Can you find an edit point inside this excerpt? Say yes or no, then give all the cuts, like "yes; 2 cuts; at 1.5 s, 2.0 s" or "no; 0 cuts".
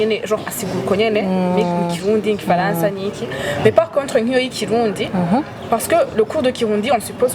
no; 0 cuts